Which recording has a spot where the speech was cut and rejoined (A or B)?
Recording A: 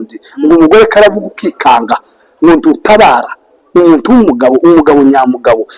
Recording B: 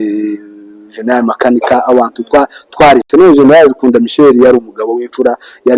B